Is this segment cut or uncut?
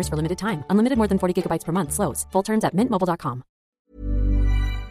cut